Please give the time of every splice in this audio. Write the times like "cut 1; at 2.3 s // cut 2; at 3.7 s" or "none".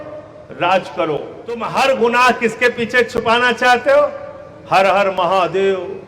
cut 1; at 1.6 s